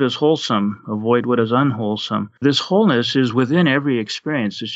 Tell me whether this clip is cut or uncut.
cut